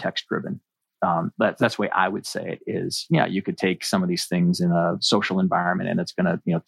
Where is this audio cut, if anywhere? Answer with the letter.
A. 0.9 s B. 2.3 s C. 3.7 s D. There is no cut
D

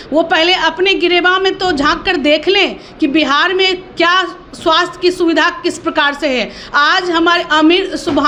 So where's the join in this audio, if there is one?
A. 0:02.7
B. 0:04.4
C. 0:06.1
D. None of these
D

